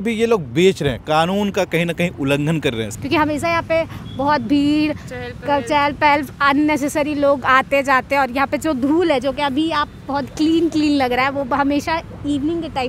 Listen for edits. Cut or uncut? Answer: cut